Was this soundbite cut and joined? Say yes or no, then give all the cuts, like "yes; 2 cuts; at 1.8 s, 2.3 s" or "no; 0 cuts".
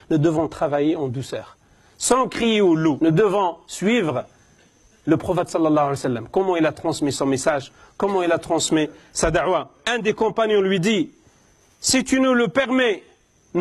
yes; 2 cuts; at 3.0 s, 9.8 s